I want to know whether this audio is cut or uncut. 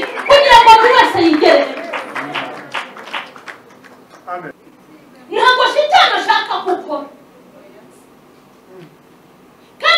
cut